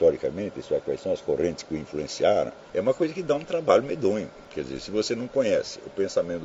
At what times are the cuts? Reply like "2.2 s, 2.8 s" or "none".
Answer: 2.6 s, 4.4 s